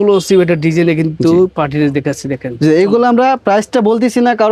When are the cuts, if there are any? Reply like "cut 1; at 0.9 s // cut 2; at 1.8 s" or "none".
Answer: none